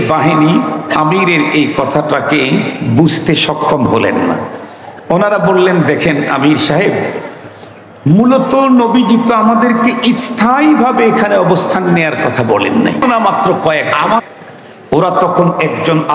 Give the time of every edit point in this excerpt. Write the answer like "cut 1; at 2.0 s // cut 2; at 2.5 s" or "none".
cut 1; at 13.0 s

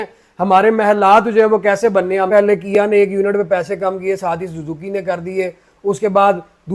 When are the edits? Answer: cut 1; at 2.3 s

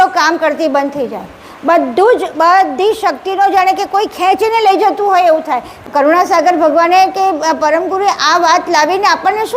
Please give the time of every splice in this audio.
cut 1; at 5.8 s

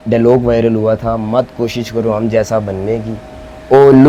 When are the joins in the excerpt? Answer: none

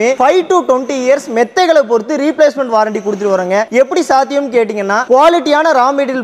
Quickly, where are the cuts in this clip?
none

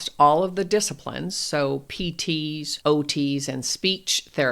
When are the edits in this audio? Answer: cut 1; at 2.7 s

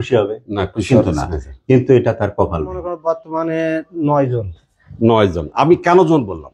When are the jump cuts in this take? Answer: cut 1; at 2.9 s

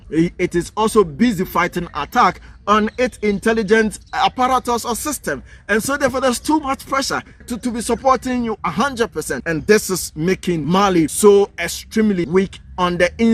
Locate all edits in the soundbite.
cut 1; at 7.5 s // cut 2; at 9.4 s // cut 3; at 11.0 s // cut 4; at 12.2 s

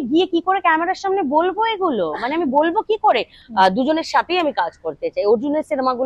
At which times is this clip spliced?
cut 1; at 3.4 s

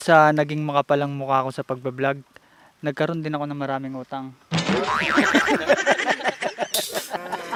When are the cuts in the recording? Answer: none

